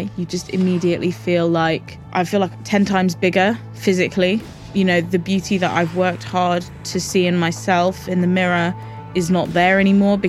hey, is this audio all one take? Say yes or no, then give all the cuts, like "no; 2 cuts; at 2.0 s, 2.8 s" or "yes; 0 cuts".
no; 2 cuts; at 1.9 s, 4.5 s